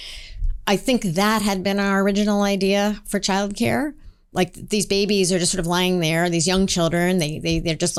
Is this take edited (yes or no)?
no